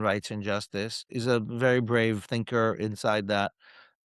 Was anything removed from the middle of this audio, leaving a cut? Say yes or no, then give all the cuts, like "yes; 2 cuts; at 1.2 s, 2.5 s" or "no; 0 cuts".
yes; 1 cut; at 1.0 s